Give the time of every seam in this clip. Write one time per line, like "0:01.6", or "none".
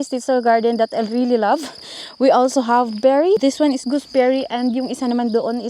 0:03.4